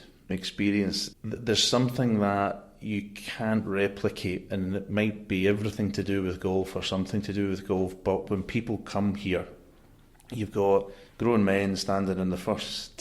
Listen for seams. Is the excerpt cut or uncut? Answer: cut